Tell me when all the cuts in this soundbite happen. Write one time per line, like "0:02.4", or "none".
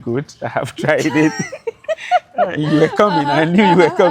none